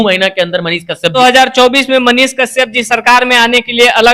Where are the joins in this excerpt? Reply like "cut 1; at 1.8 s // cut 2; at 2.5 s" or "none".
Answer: cut 1; at 1.1 s